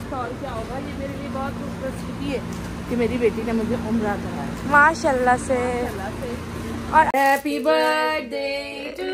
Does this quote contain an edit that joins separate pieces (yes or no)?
yes